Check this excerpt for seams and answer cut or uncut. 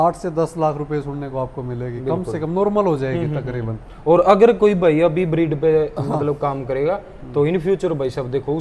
uncut